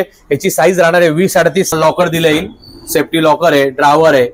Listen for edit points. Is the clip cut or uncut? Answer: cut